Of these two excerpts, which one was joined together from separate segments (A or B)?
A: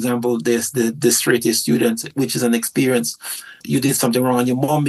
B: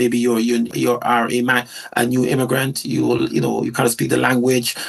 A